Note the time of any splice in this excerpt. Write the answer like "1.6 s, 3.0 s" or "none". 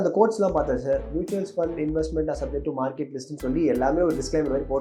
none